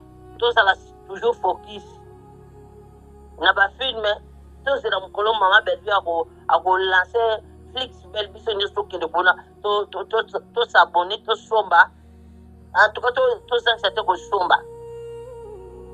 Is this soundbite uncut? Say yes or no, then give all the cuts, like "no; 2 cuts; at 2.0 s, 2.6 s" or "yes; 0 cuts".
no; 2 cuts; at 1.8 s, 3.4 s